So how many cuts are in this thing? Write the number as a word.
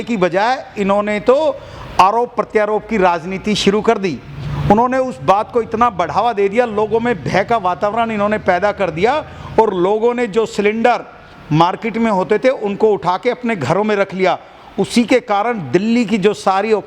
zero